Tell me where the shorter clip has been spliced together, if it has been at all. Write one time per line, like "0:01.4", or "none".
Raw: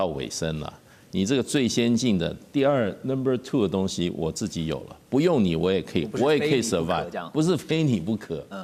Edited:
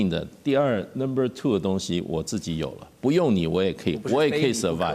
none